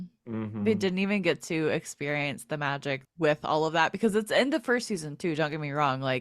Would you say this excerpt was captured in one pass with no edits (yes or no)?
no